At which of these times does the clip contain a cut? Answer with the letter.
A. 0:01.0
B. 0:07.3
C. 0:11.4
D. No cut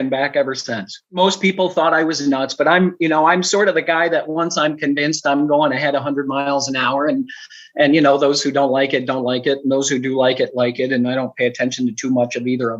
A